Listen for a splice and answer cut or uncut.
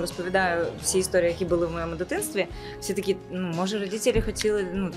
uncut